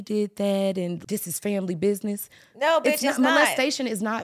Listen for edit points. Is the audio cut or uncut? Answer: cut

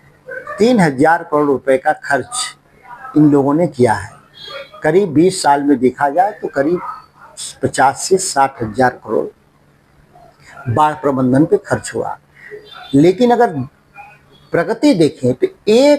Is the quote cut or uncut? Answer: uncut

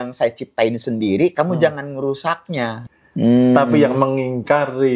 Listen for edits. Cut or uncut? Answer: cut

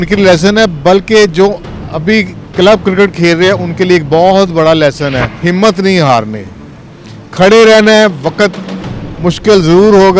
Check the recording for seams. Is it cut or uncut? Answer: cut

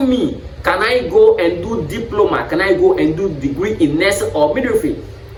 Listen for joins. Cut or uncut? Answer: uncut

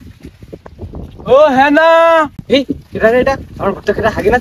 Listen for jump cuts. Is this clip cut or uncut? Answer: uncut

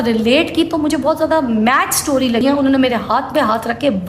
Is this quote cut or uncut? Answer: cut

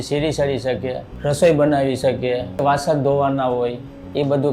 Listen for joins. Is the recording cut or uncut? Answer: cut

